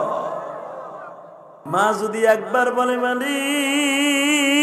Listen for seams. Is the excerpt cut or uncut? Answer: cut